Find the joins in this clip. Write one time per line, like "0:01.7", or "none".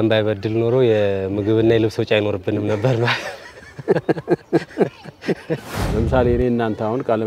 0:05.8

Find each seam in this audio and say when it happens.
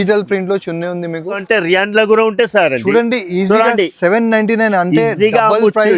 0:01.4

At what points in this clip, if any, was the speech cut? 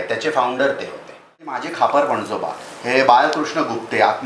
0:01.6

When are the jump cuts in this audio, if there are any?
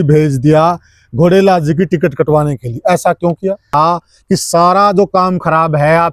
0:03.7

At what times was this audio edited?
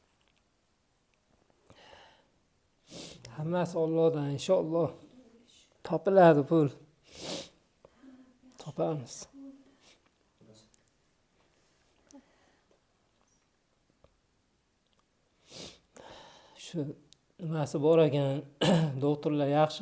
none

